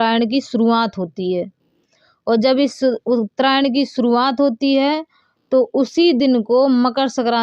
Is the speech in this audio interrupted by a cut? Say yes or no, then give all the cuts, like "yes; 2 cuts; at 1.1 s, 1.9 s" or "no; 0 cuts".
no; 0 cuts